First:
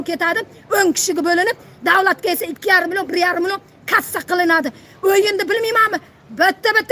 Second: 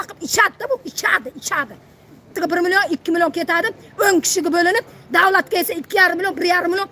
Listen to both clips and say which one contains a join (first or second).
second